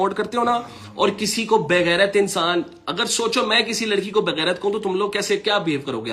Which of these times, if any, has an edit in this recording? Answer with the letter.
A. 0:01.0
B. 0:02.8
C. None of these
C